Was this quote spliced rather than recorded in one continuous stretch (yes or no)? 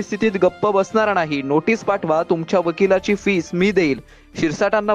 no